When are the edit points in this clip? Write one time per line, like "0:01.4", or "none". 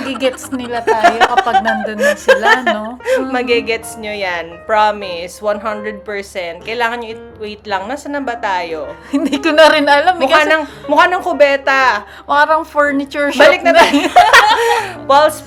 none